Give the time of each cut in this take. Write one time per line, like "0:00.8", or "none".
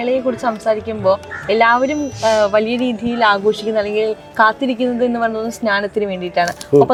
none